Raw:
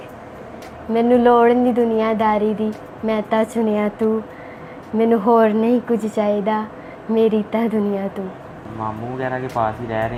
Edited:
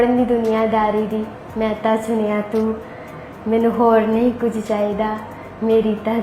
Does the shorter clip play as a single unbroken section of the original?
yes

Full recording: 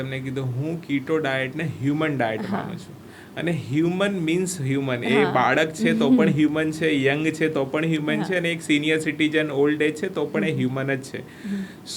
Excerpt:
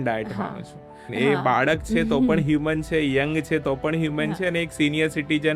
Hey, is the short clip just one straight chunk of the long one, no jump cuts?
no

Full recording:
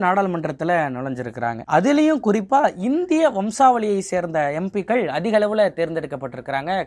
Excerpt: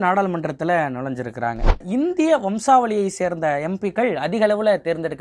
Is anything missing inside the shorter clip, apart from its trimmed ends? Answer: yes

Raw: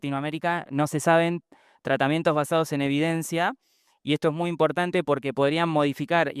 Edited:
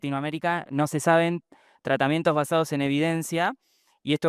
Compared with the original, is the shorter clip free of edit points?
yes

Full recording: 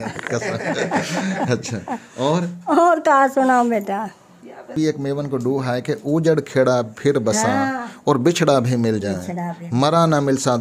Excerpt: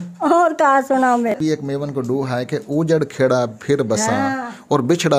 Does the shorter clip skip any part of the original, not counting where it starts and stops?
yes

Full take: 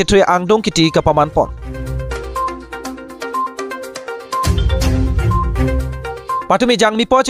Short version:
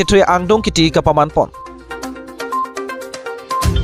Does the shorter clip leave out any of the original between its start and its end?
yes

